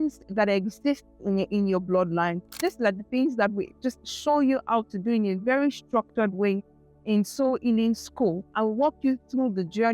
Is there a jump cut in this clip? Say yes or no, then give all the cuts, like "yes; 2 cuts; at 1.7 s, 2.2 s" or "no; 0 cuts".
yes; 3 cuts; at 1.5 s, 2.6 s, 8.5 s